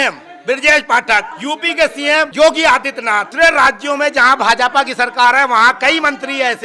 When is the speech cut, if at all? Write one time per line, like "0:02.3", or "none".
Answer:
0:01.3
0:02.3
0:03.3